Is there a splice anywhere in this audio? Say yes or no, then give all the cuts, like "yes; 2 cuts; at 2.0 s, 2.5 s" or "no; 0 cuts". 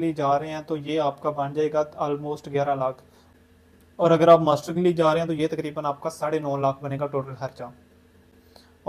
no; 0 cuts